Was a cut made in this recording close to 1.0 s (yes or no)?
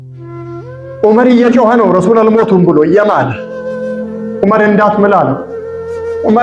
yes